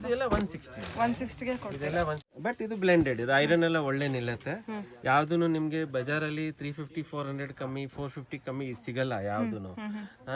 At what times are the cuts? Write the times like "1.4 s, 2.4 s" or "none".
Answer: 2.3 s